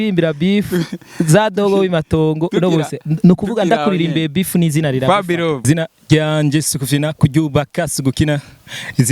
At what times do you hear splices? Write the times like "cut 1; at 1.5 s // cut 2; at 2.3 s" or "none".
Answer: cut 1; at 5.6 s